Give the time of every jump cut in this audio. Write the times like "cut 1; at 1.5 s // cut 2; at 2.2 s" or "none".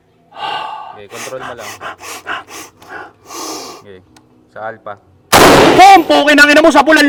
none